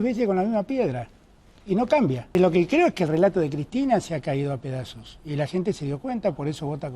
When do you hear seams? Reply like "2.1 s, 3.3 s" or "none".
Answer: 2.4 s